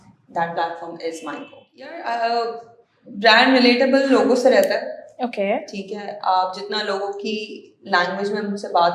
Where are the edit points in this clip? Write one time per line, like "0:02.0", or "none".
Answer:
0:02.0

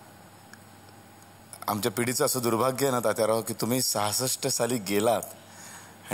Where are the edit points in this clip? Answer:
0:01.4

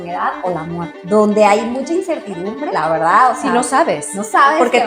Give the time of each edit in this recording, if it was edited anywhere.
0:01.0
0:02.7

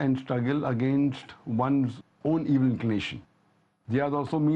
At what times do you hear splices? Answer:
0:03.1

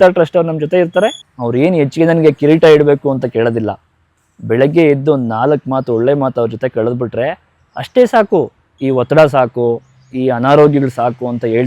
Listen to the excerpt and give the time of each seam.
0:01.2
0:08.7

